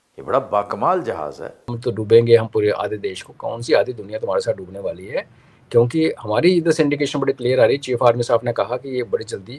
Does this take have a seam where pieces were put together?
yes; 1 cut; at 1.7 s

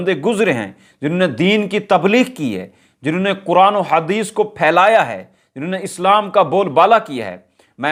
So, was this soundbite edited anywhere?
no; 0 cuts

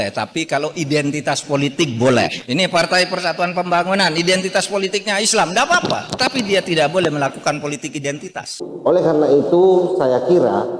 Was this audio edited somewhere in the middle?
yes; 1 cut; at 8.6 s

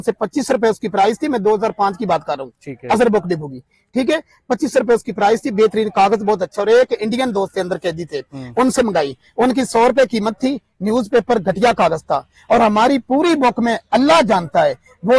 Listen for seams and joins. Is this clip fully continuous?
yes; 0 cuts

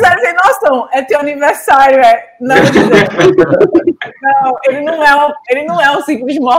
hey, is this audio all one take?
yes; 0 cuts

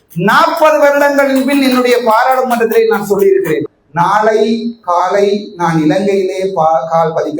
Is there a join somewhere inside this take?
yes; 1 cut; at 3.8 s

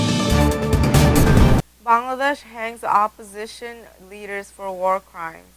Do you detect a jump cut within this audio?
yes; 1 cut; at 1.3 s

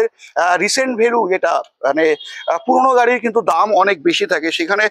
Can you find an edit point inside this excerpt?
no; 0 cuts

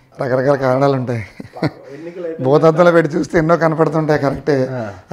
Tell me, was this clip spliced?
no; 0 cuts

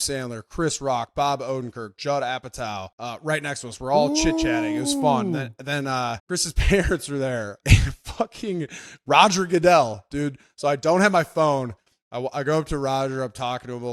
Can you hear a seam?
no; 0 cuts

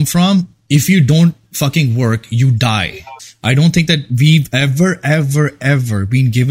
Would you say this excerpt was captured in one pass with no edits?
no; 1 cut; at 3.3 s

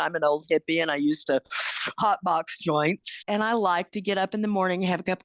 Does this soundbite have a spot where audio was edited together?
yes; 1 cut; at 3.1 s

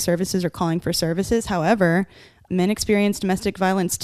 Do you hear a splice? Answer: yes; 1 cut; at 2.4 s

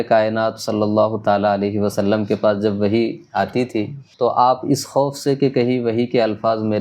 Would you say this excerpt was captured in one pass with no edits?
no; 1 cut; at 4.0 s

